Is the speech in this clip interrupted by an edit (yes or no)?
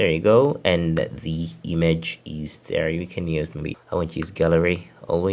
yes